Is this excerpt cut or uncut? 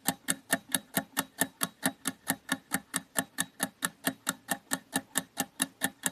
uncut